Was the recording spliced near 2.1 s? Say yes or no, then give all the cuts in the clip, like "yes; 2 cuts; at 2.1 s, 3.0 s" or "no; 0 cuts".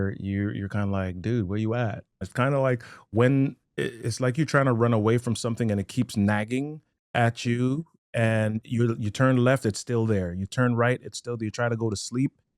yes; 1 cut; at 2.1 s